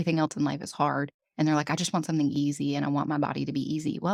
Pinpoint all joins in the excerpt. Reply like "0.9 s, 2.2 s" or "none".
none